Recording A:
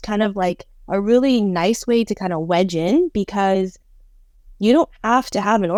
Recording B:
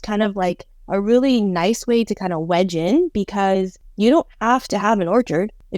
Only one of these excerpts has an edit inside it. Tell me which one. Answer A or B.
B